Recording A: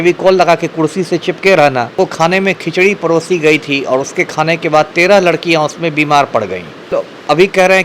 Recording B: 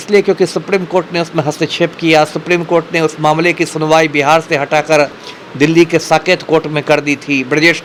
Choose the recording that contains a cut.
A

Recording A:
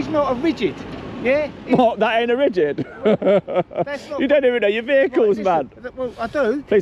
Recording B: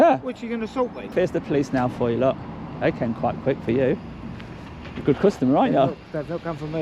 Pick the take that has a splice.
B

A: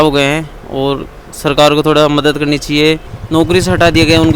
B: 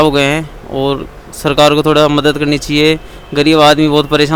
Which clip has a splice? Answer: A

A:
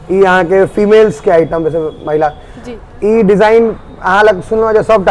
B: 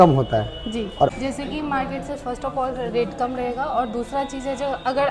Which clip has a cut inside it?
B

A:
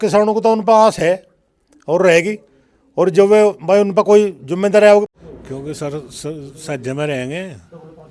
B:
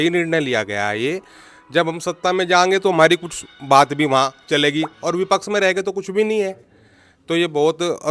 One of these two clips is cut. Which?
A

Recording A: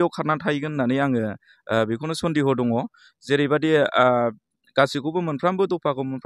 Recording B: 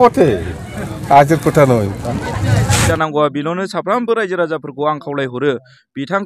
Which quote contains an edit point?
B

